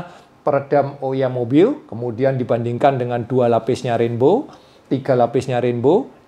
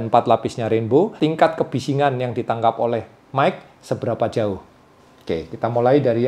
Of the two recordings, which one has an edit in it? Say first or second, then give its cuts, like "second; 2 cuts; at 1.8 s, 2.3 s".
second; 1 cut; at 1.1 s